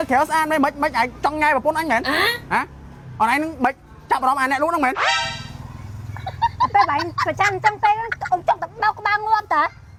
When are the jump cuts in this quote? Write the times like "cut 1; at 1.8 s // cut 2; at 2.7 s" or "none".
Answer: none